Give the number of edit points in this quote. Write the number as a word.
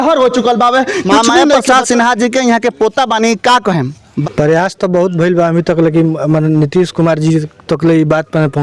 two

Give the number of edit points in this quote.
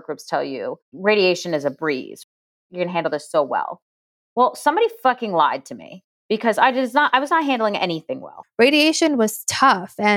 two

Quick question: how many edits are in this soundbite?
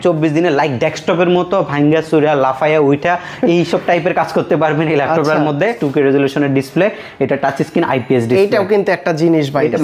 one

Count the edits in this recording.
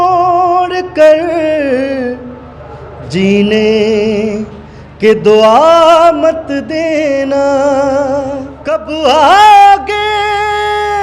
one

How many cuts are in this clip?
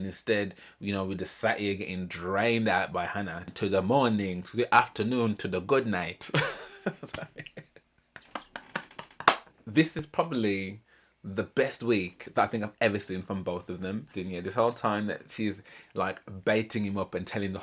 three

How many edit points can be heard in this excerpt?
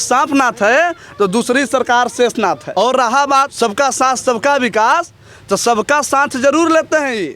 two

